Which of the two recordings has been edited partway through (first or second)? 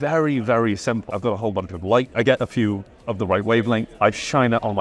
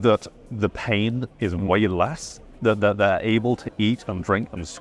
first